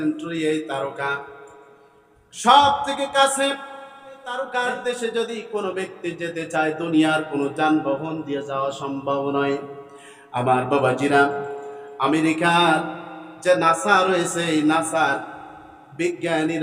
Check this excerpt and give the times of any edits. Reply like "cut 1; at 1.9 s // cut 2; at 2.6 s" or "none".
cut 1; at 4.3 s